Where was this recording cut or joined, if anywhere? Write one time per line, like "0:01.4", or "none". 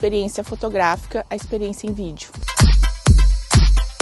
0:02.3